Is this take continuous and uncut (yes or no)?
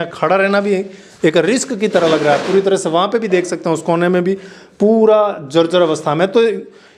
yes